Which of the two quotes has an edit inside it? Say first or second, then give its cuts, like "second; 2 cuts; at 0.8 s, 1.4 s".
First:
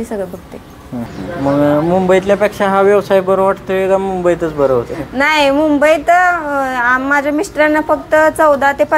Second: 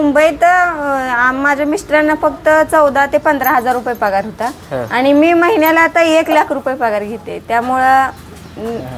first; 1 cut; at 1.1 s